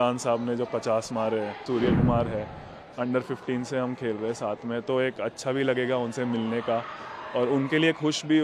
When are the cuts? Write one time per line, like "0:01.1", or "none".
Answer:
0:01.6